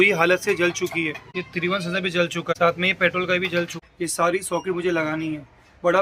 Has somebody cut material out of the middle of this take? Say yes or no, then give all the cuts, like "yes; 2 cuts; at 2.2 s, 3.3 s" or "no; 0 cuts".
yes; 3 cuts; at 1.2 s, 2.5 s, 3.8 s